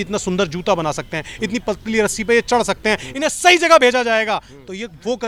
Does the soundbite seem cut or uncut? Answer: uncut